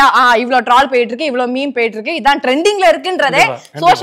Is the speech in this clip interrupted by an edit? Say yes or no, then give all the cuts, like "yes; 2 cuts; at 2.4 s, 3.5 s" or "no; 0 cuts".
no; 0 cuts